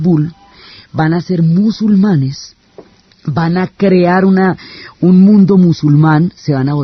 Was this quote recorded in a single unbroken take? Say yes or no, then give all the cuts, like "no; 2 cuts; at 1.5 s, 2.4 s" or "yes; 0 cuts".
yes; 0 cuts